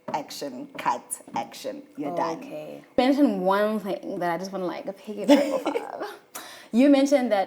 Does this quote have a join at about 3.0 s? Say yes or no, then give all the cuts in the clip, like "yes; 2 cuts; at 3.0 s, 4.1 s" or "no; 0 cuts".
yes; 1 cut; at 3.0 s